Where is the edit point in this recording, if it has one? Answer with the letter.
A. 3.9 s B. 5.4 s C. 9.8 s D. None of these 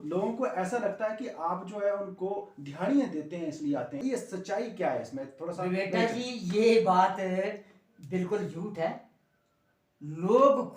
A